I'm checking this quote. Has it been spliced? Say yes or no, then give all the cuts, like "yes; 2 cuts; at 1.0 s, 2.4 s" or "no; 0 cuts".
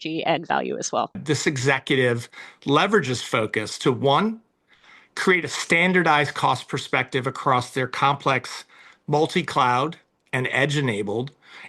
yes; 1 cut; at 1.2 s